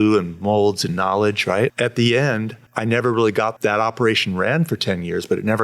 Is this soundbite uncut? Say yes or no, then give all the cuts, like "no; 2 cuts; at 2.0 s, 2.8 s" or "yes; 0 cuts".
no; 3 cuts; at 1.7 s, 2.6 s, 3.5 s